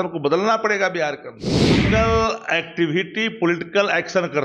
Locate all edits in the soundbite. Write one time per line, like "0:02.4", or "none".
0:01.8